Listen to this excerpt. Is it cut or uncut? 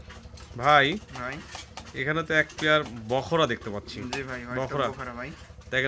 uncut